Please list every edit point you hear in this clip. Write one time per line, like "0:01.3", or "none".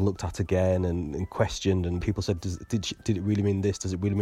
0:02.0